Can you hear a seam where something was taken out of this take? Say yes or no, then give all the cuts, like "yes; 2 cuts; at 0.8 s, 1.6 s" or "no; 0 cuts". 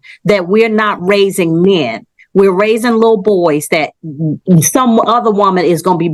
no; 0 cuts